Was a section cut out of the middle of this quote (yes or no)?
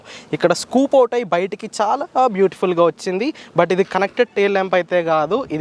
no